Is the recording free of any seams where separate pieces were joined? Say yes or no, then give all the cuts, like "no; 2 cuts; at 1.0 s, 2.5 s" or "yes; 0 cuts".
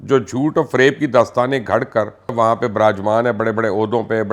no; 1 cut; at 2.3 s